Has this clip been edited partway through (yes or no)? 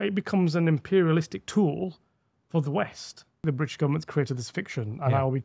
yes